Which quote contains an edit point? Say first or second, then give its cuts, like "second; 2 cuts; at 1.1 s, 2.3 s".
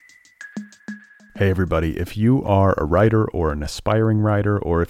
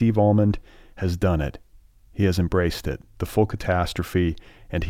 first; 1 cut; at 0.9 s